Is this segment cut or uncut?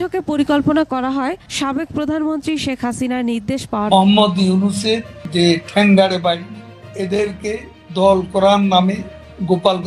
cut